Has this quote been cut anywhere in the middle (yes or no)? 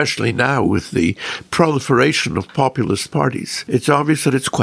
yes